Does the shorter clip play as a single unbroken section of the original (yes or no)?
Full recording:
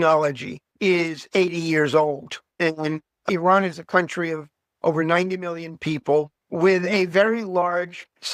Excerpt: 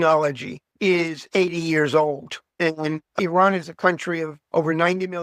no